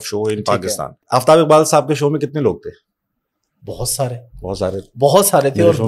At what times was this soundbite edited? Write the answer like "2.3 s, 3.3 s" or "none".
1.0 s